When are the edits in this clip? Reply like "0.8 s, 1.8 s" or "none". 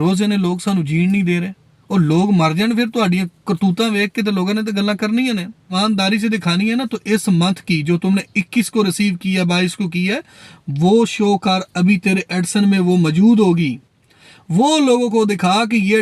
5.7 s